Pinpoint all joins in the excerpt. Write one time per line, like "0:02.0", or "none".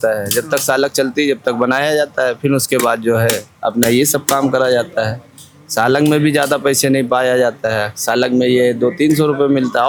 none